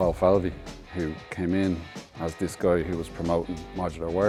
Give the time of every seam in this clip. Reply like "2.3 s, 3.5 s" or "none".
none